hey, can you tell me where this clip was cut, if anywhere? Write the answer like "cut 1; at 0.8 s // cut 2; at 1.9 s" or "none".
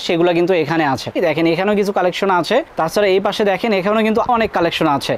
cut 1; at 1.2 s // cut 2; at 4.3 s